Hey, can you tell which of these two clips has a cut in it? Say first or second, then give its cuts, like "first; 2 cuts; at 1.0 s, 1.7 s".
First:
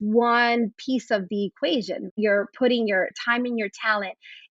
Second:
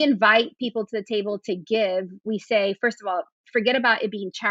first; 2 cuts; at 2.1 s, 3.2 s